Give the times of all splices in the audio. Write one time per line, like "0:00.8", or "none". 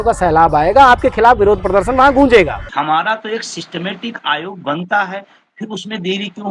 0:02.7